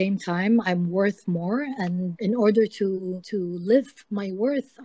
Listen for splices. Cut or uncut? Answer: cut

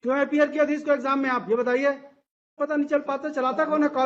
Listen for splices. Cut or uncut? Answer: cut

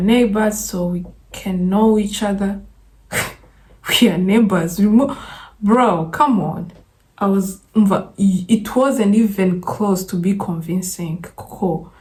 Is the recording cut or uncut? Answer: uncut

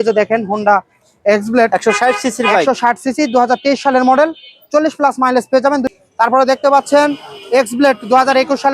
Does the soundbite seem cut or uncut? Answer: cut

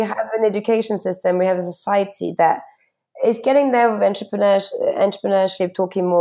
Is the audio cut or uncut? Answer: uncut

